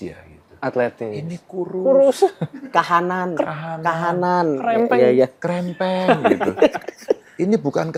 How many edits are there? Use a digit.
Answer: 0